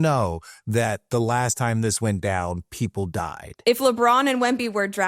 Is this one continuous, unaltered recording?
no; 1 cut; at 3.5 s

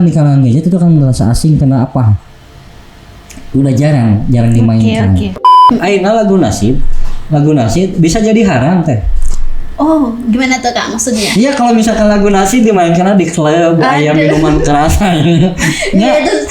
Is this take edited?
yes; 1 cut; at 5.6 s

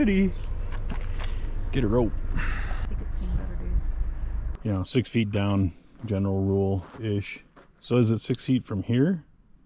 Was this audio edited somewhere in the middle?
yes; 2 cuts; at 2.8 s, 4.5 s

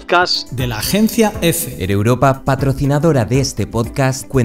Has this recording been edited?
yes; 1 cut; at 1.7 s

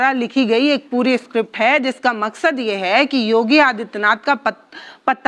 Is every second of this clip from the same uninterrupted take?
yes; 0 cuts

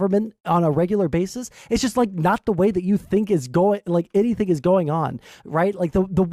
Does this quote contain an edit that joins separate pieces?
no; 0 cuts

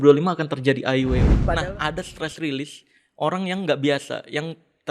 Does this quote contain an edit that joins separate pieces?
yes; 1 cut; at 1.4 s

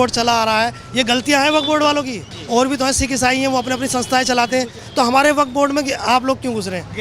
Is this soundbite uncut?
no; 2 cuts; at 2.3 s, 4.8 s

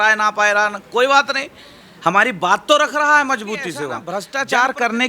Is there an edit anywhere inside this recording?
yes; 1 cut; at 4.0 s

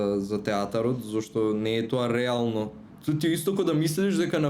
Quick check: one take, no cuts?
no; 1 cut; at 2.9 s

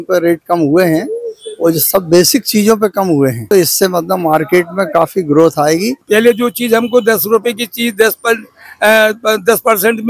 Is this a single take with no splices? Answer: no; 2 cuts; at 3.5 s, 6.0 s

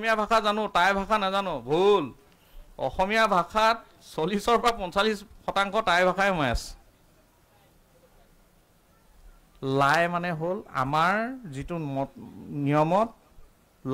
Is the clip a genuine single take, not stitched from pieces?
yes; 0 cuts

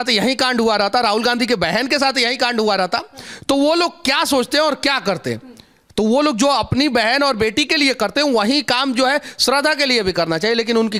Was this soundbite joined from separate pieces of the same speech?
no; 0 cuts

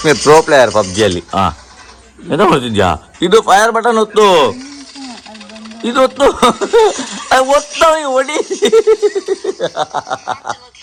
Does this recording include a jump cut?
no; 0 cuts

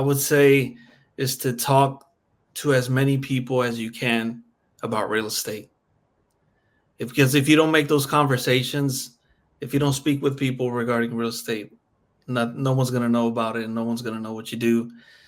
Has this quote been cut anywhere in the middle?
no; 0 cuts

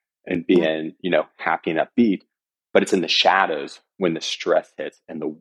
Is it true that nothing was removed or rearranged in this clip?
yes; 0 cuts

